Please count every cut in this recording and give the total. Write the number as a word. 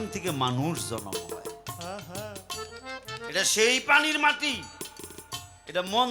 zero